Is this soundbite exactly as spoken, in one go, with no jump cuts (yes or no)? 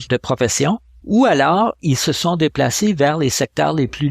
no